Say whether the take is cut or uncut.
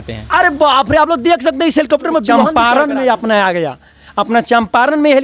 cut